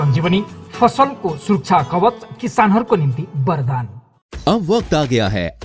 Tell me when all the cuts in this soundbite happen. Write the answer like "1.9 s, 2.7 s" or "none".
none

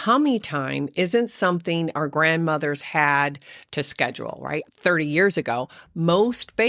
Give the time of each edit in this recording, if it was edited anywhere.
none

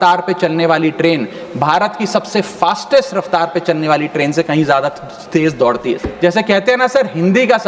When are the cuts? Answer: 6.1 s

